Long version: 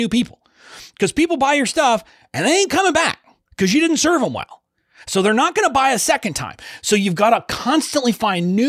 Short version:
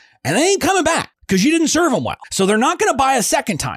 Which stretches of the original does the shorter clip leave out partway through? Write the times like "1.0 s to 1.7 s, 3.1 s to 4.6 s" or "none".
3.2 s to 3.4 s, 4.5 s to 5.0 s